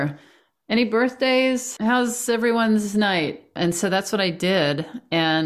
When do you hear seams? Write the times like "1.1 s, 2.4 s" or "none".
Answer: 1.7 s, 3.5 s